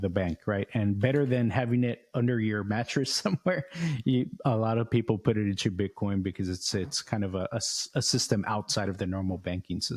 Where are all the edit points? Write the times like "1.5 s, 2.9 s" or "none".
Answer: none